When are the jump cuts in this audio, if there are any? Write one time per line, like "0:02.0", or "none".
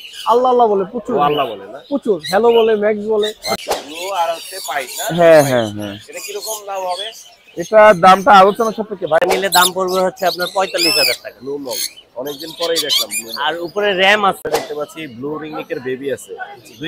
0:03.6
0:09.2
0:14.5

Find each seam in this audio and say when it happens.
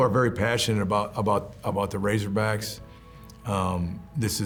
none

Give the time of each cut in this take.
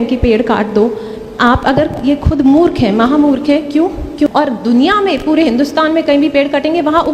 0:04.3

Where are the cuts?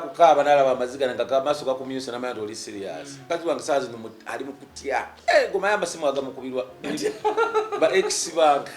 0:03.2
0:05.1

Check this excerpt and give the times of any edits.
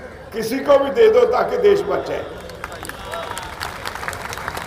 none

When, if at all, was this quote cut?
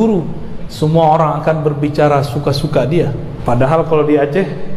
0:03.3

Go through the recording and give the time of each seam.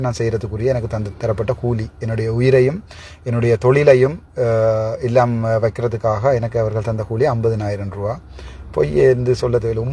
none

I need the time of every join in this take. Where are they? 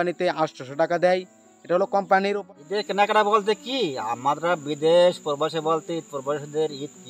0:02.4

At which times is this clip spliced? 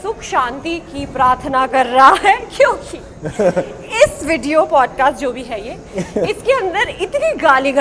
none

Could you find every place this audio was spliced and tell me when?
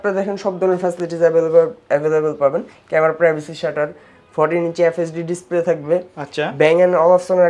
none

